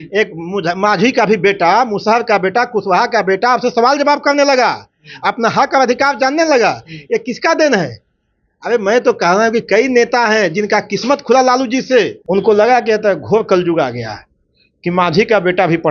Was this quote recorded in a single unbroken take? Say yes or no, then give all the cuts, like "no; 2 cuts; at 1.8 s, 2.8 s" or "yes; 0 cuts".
no; 1 cut; at 12.2 s